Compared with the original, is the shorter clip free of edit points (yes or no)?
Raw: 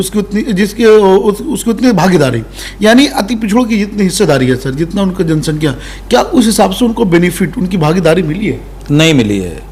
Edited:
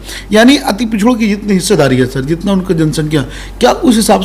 yes